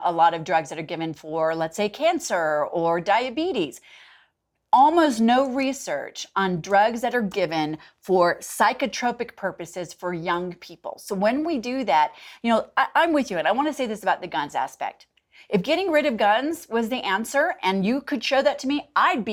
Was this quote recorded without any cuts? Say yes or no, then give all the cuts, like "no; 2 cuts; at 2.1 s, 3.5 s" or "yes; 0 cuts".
yes; 0 cuts